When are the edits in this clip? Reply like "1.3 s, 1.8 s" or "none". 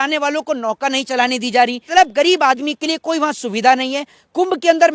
1.9 s